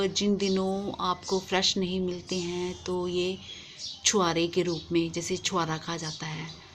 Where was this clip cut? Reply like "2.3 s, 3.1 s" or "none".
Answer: 1.8 s